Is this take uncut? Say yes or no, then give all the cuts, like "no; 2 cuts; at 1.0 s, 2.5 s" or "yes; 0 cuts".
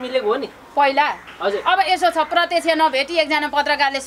yes; 0 cuts